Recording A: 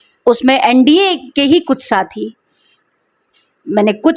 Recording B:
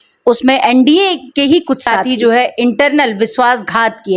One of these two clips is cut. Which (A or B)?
B